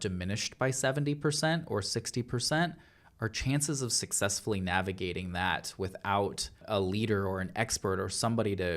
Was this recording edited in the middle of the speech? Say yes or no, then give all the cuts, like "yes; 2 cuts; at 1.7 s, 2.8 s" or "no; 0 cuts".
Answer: yes; 1 cut; at 6.6 s